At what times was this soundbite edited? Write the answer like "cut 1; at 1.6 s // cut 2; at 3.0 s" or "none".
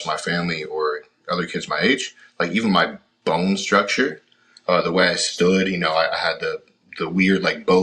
none